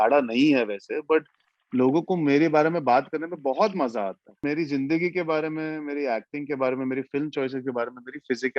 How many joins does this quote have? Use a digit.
1